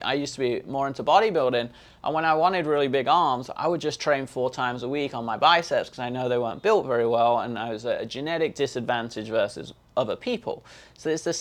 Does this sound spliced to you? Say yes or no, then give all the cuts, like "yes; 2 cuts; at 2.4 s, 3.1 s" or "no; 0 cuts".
no; 0 cuts